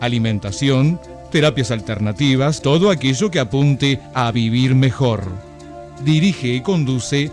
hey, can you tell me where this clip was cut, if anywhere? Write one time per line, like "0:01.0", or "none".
0:02.6